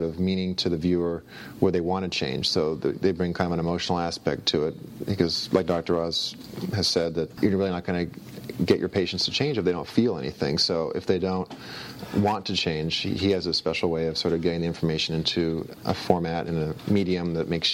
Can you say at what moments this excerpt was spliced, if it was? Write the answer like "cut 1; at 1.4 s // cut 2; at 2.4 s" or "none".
cut 1; at 7.3 s